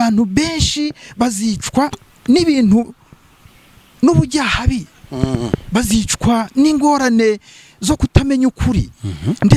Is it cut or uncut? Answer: uncut